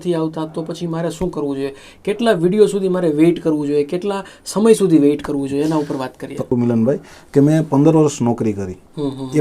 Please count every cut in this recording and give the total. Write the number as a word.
one